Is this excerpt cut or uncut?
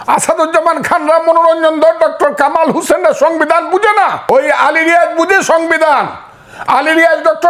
cut